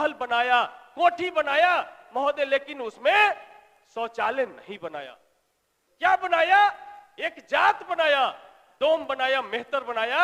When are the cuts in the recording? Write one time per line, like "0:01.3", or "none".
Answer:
none